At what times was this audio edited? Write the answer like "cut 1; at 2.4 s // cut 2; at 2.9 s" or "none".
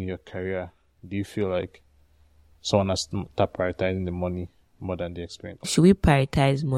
cut 1; at 5.7 s